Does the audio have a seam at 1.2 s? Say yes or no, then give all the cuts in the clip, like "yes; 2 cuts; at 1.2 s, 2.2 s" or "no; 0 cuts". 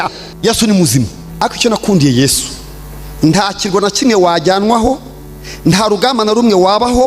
yes; 1 cut; at 1.2 s